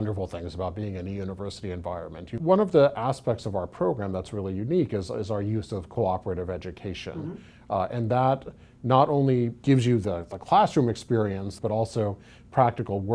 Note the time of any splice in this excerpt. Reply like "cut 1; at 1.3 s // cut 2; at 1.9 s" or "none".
cut 1; at 2.4 s // cut 2; at 9.6 s // cut 3; at 11.5 s